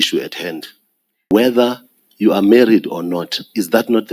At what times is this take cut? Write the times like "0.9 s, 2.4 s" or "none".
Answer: 1.3 s